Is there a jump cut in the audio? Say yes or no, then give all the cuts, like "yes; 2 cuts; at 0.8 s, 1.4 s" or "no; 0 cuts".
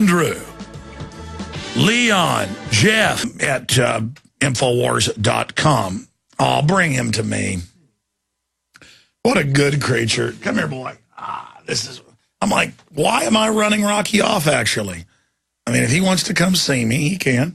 no; 0 cuts